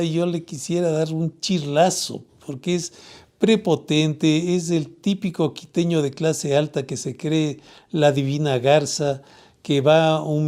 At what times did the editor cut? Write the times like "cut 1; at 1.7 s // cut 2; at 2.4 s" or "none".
none

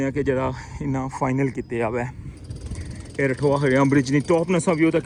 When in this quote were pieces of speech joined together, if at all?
none

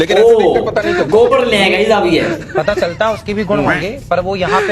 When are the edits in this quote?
cut 1; at 2.4 s

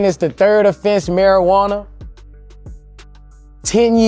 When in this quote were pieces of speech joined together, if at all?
none

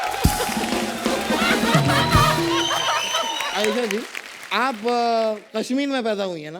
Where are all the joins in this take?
cut 1; at 3.4 s

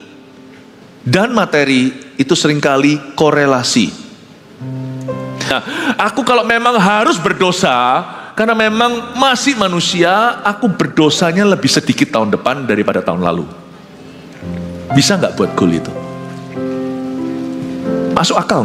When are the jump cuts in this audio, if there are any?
cut 1; at 5.5 s

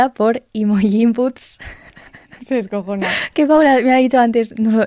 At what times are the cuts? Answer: none

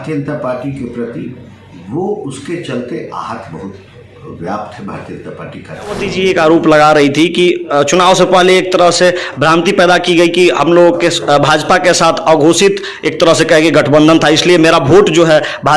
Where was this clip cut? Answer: cut 1; at 6.1 s

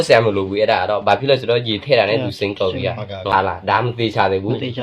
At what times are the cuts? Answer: cut 1; at 3.3 s

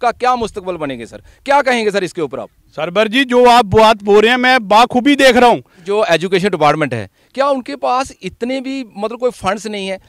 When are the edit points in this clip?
cut 1; at 5.8 s

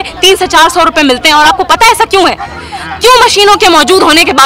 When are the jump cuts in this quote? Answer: none

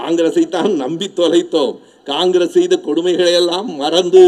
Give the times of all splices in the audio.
none

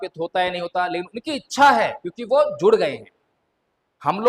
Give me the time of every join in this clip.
none

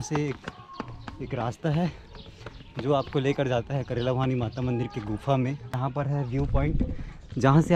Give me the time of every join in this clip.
cut 1; at 5.8 s

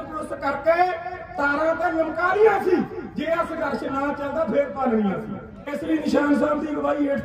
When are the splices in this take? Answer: cut 1; at 5.7 s

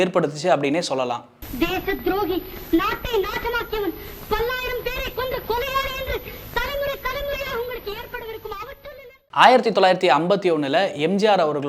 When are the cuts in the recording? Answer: none

